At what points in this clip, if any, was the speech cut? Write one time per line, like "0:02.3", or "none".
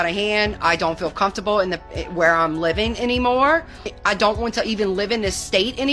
none